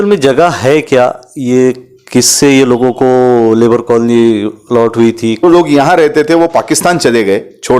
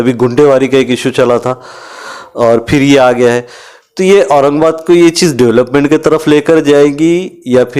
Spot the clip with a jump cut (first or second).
first